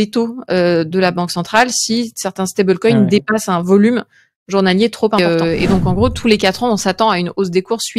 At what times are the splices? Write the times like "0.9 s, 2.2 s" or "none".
5.6 s